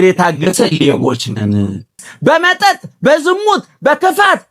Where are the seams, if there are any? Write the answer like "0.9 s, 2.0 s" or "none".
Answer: 2.1 s